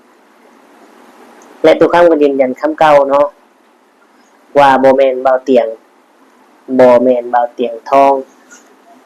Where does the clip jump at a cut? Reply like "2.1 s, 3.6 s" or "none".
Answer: none